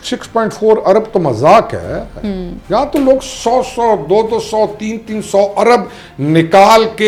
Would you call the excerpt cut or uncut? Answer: uncut